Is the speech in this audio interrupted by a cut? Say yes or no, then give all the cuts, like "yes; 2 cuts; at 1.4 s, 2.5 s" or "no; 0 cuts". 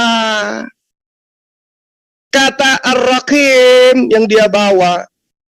no; 0 cuts